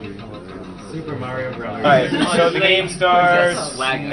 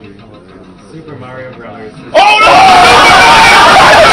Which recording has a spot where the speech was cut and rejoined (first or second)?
second